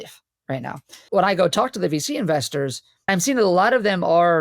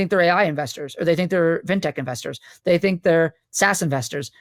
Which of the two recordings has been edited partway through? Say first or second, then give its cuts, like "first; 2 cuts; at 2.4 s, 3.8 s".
first; 2 cuts; at 1.0 s, 3.1 s